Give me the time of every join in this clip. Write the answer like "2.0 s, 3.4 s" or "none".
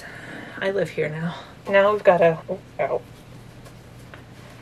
1.5 s, 2.4 s